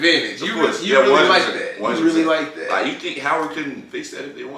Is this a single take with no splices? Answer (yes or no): yes